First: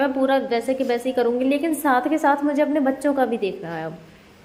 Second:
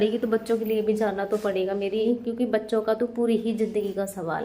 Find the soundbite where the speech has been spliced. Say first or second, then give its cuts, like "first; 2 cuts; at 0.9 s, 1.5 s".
second; 1 cut; at 2.0 s